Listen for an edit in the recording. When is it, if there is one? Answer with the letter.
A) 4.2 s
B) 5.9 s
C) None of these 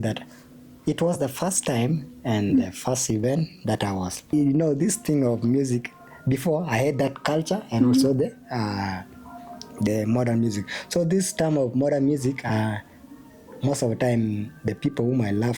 A